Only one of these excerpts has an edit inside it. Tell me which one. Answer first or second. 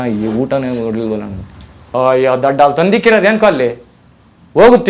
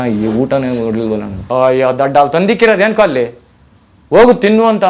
second